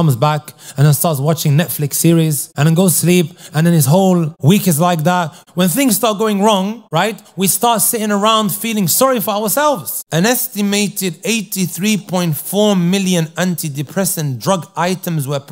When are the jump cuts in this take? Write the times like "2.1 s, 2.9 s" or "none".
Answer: 2.5 s, 4.3 s, 5.4 s, 6.8 s, 9.9 s